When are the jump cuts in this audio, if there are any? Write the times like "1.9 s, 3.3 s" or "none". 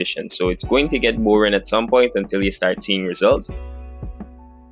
3.5 s